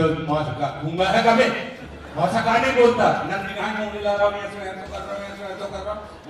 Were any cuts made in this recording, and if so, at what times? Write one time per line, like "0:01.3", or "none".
none

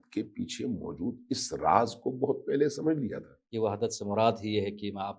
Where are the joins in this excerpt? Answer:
0:03.4

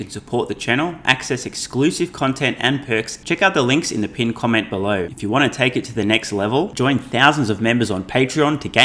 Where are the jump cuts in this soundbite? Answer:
0:03.2
0:05.1

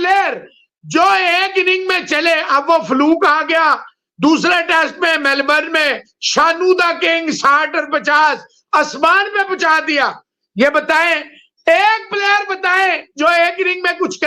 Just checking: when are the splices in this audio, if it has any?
none

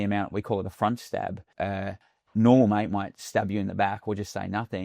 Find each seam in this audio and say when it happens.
0:01.8

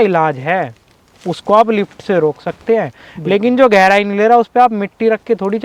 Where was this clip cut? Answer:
none

